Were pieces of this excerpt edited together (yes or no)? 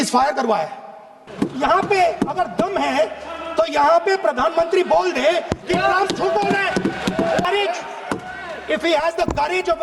yes